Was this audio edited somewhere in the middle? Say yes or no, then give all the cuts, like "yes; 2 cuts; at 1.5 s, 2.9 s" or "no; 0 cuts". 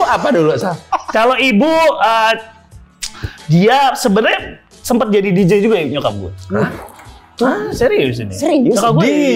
no; 0 cuts